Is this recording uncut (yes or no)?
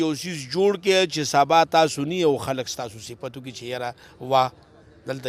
yes